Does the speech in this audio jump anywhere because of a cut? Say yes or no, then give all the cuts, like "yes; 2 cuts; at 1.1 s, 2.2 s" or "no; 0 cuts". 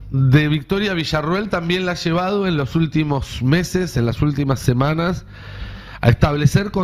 no; 0 cuts